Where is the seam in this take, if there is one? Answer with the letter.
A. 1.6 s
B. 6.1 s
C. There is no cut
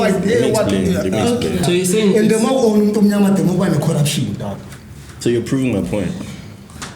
A